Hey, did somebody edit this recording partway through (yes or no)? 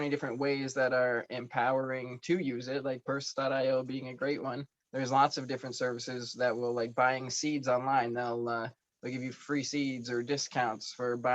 yes